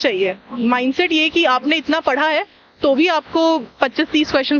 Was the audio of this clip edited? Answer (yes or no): no